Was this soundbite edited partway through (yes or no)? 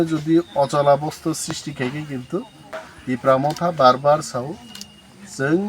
yes